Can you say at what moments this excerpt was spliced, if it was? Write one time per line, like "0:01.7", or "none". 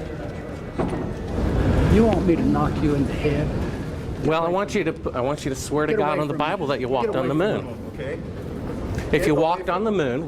0:01.3